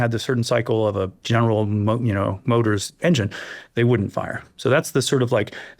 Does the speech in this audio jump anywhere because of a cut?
yes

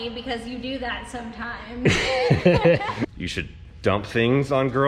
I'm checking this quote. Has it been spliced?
yes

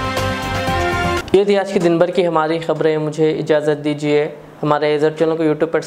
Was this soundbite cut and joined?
no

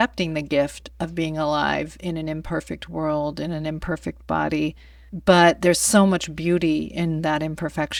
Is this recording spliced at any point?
no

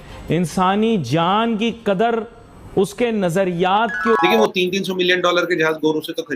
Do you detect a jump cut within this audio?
yes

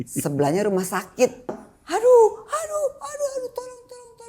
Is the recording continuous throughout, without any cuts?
no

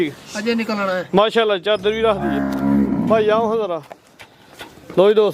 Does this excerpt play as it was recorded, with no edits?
yes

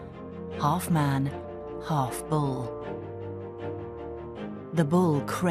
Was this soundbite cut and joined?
no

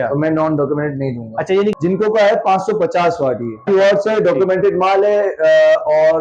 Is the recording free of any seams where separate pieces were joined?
no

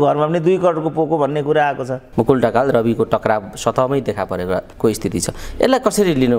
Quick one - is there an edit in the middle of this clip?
yes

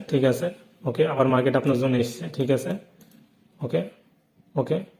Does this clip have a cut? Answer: no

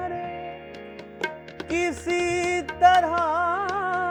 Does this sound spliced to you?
no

